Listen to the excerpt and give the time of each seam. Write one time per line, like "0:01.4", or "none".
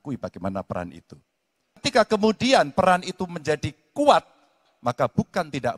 0:01.9